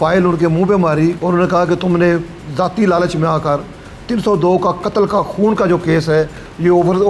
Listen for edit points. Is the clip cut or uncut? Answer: cut